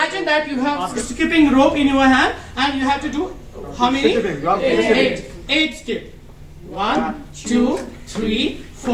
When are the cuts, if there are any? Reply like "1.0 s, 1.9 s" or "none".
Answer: 0.9 s